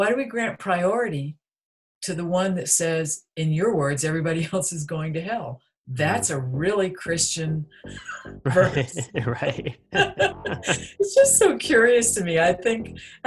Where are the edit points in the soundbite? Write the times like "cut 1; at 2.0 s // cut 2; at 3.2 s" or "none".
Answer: none